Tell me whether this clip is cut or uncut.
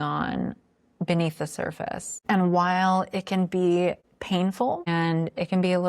cut